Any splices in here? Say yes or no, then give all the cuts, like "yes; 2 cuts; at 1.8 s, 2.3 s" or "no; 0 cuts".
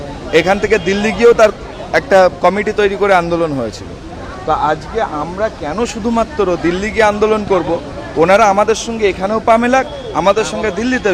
no; 0 cuts